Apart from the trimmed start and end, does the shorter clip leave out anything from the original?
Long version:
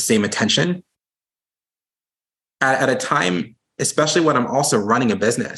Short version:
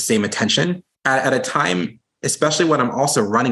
yes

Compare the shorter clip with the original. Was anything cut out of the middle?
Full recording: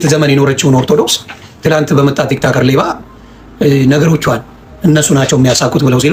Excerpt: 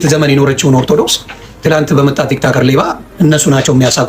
yes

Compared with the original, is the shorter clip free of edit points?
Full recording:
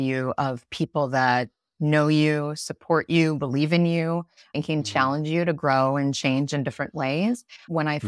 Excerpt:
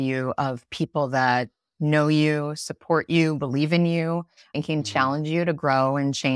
yes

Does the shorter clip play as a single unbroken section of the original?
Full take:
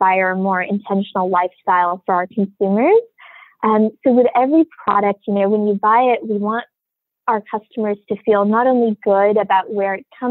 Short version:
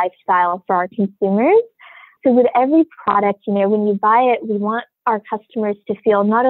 no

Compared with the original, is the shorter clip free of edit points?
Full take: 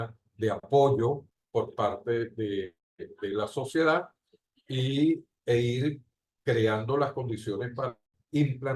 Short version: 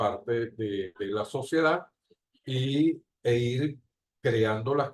no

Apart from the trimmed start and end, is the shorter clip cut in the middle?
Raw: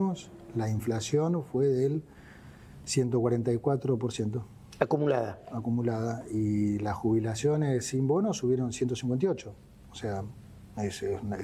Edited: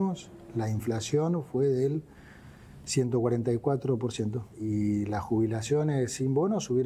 yes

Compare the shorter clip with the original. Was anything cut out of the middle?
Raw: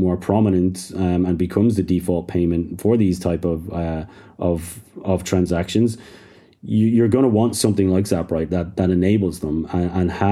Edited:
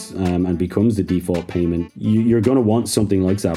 yes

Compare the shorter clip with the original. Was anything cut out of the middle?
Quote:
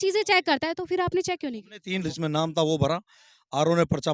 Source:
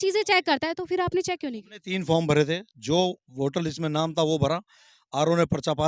yes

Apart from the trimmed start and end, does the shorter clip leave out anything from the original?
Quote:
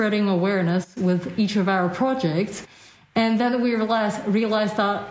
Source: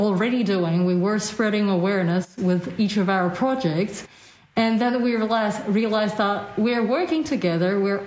no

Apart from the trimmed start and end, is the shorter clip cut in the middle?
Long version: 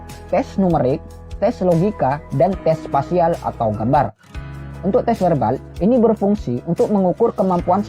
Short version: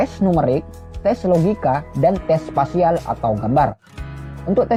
no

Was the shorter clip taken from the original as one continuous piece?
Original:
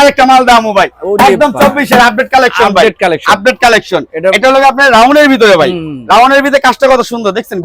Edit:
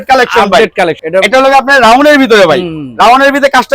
no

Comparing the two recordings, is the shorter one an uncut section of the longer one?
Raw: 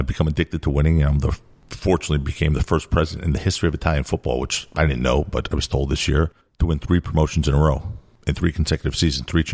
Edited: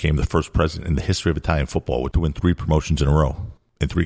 no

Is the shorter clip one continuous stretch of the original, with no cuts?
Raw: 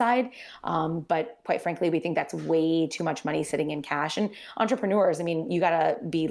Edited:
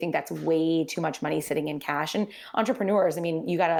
yes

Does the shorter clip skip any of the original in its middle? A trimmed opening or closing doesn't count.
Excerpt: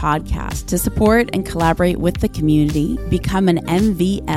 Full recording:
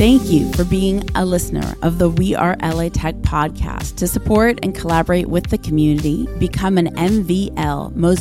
no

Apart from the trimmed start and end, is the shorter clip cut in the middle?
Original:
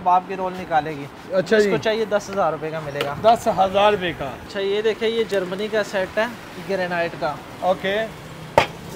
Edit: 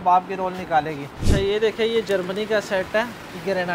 yes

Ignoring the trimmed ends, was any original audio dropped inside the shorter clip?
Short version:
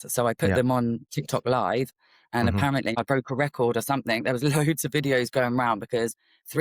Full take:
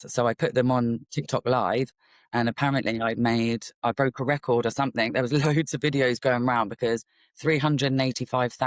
yes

